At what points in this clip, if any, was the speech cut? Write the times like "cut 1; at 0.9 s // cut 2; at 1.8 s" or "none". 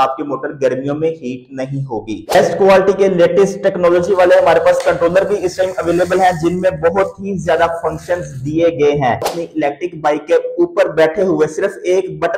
cut 1; at 2.2 s // cut 2; at 9.4 s